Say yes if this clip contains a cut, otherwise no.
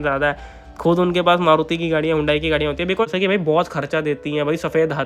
yes